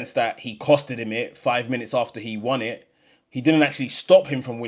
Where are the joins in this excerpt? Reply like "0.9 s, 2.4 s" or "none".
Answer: none